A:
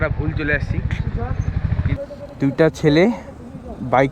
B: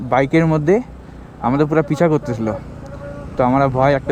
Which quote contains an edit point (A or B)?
A